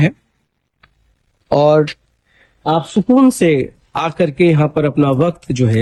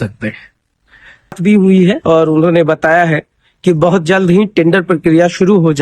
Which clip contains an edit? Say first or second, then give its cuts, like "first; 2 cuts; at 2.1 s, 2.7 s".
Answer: second; 1 cut; at 1.4 s